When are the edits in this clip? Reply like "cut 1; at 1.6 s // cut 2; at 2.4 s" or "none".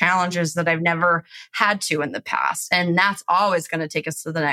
none

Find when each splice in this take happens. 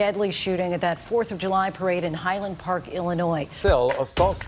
cut 1; at 3.5 s

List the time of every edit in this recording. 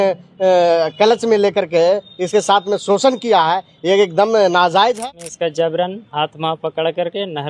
cut 1; at 5.0 s

